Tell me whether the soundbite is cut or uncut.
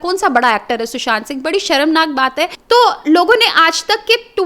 cut